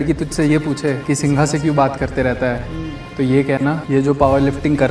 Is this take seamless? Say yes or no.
no